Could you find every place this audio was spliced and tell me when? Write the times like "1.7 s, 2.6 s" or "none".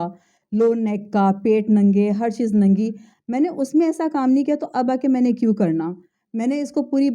none